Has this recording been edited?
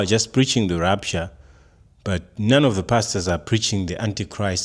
no; 0 cuts

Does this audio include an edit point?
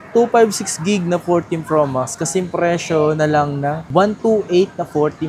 no; 0 cuts

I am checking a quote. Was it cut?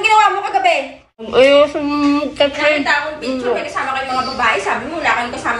yes; 1 cut; at 1.3 s

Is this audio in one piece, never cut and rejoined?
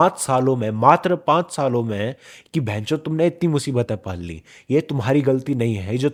yes; 0 cuts

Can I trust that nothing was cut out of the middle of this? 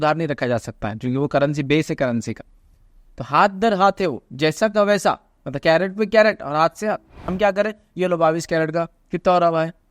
no; 1 cut; at 7.2 s

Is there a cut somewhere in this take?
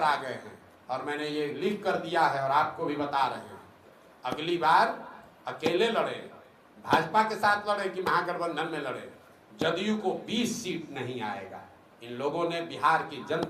no; 0 cuts

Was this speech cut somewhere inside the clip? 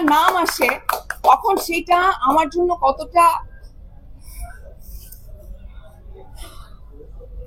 no; 0 cuts

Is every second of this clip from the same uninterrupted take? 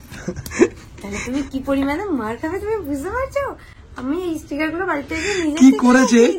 yes; 0 cuts

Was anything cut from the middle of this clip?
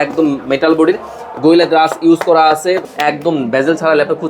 yes; 1 cut; at 2.9 s

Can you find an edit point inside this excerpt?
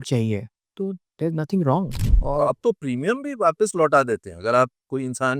yes; 1 cut; at 2.1 s

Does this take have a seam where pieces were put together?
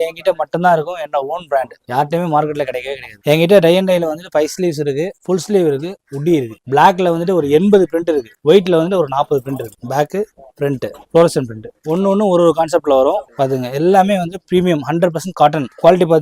yes; 4 cuts; at 3.2 s, 6.5 s, 9.8 s, 13.3 s

